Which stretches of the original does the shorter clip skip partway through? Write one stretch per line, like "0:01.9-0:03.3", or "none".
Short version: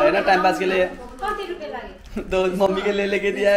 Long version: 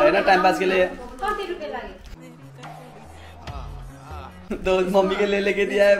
0:02.0-0:04.3